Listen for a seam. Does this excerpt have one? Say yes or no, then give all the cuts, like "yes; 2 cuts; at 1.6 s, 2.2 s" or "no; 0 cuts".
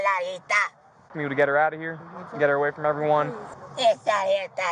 yes; 1 cut; at 1.0 s